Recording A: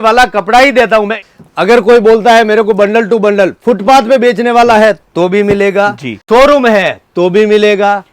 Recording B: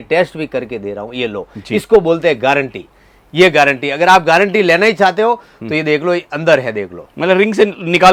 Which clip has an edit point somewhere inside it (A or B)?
A